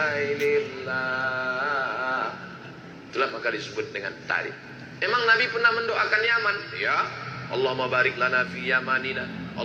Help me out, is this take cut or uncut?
uncut